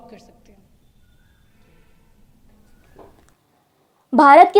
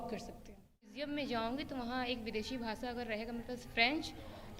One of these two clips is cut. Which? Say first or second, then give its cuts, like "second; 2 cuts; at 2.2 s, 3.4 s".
second; 1 cut; at 1.0 s